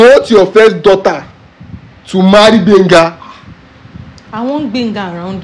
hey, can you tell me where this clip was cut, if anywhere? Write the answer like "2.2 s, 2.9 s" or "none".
none